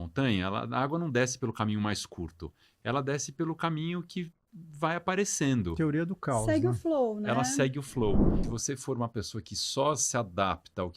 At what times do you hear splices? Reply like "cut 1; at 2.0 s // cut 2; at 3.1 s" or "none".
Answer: cut 1; at 8.3 s